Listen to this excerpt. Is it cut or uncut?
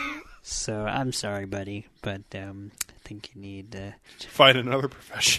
cut